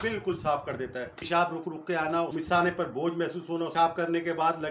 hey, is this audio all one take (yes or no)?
no